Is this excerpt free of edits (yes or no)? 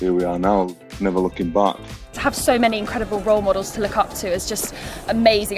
no